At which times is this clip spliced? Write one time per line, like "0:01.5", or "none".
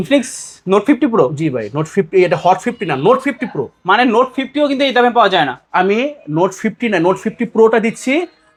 none